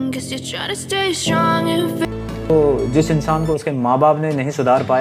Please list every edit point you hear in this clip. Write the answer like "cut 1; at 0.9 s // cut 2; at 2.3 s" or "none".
cut 1; at 2.0 s